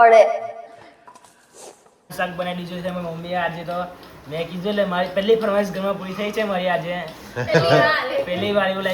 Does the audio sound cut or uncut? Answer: cut